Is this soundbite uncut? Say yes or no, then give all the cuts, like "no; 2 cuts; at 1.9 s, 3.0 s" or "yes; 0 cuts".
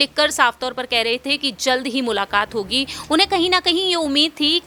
yes; 0 cuts